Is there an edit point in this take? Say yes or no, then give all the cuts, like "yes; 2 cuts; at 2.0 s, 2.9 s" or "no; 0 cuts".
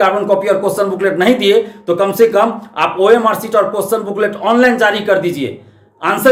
no; 0 cuts